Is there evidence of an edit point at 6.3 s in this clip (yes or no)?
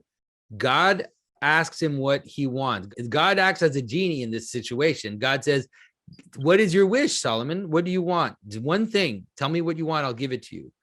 no